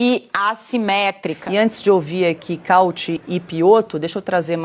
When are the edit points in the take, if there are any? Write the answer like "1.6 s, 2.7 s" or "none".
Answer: 1.4 s